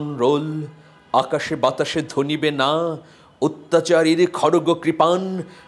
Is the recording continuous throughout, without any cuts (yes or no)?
yes